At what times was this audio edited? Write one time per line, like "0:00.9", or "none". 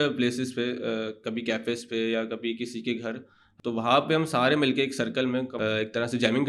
0:03.4
0:05.5